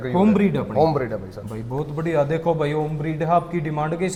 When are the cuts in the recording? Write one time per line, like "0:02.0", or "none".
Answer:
none